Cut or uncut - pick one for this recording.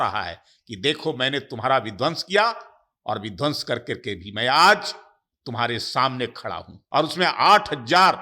cut